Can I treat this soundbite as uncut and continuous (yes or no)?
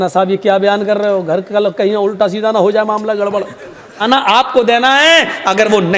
no